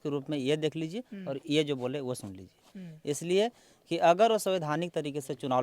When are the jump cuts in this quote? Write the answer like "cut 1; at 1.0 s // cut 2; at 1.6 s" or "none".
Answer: none